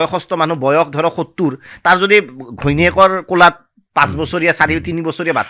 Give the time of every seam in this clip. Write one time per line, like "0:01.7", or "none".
none